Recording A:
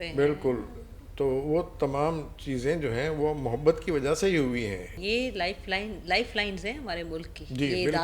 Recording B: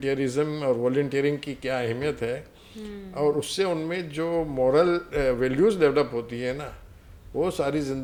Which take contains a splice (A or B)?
A